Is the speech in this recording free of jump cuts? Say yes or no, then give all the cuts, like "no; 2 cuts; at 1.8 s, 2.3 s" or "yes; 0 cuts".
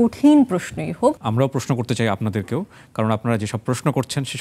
no; 1 cut; at 1.2 s